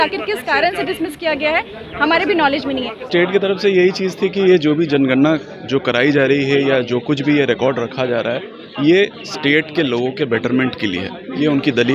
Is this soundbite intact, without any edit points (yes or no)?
no